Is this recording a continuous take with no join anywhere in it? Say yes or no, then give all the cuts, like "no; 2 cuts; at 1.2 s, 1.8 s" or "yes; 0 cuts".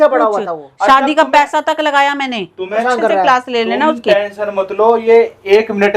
no; 1 cut; at 2.7 s